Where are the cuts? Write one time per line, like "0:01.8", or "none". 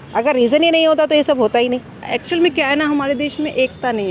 0:02.1